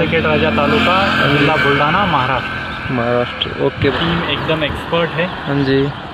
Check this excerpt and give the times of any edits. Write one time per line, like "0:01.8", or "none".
0:03.9